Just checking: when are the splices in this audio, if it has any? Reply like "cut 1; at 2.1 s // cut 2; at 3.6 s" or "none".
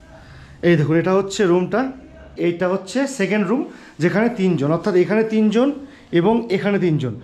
cut 1; at 2.3 s